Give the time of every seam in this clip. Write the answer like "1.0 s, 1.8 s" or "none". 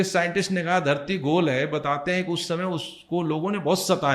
none